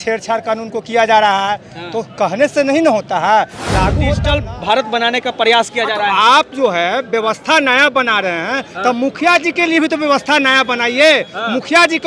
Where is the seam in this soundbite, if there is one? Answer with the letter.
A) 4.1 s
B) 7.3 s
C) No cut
A